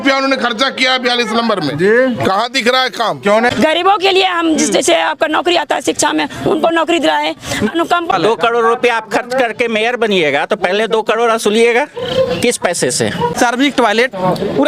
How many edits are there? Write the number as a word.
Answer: three